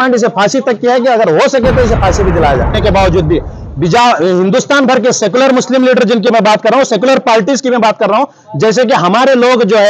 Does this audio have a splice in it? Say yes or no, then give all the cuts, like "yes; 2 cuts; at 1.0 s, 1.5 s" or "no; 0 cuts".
yes; 1 cut; at 2.8 s